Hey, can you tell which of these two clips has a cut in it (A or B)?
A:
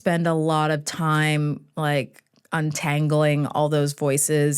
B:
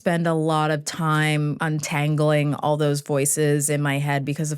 B